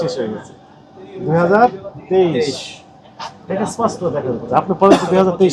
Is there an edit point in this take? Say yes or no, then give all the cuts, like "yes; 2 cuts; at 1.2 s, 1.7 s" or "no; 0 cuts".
no; 0 cuts